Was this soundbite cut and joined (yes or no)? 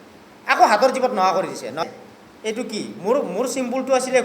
yes